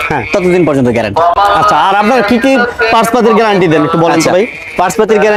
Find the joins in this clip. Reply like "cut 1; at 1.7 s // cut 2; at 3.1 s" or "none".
none